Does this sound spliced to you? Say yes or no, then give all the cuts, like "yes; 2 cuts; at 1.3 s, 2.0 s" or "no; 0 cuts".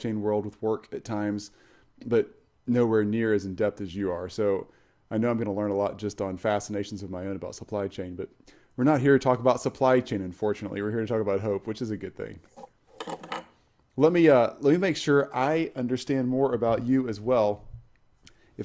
no; 0 cuts